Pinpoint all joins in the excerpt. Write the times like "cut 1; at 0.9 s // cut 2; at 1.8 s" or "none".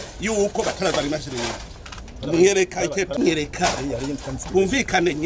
cut 1; at 3.2 s